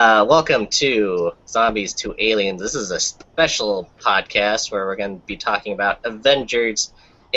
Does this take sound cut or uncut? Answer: uncut